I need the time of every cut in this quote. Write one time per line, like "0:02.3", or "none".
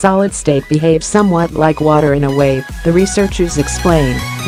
none